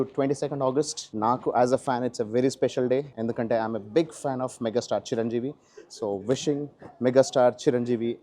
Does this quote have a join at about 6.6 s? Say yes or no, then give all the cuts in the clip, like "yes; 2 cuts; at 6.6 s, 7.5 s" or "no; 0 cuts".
no; 2 cuts; at 1.0 s, 3.1 s